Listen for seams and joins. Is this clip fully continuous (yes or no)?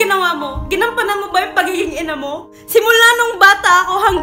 yes